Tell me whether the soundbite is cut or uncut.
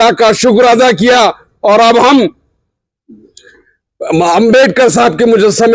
uncut